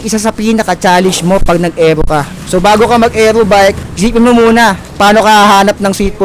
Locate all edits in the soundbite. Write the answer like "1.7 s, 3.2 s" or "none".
2.4 s, 3.9 s, 4.8 s